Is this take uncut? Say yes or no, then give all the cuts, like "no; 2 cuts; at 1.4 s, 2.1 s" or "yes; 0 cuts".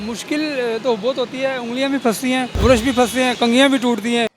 no; 2 cuts; at 2.5 s, 3.3 s